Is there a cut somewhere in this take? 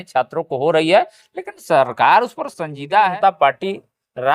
yes; 1 cut; at 3.1 s

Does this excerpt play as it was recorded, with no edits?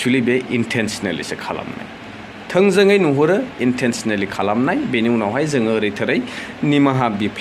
yes; 0 cuts

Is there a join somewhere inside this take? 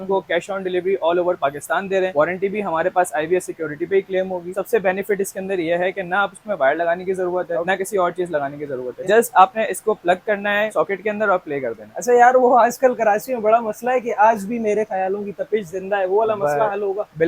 no; 0 cuts

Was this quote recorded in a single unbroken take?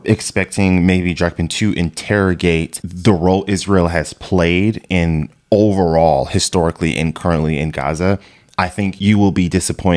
yes; 0 cuts

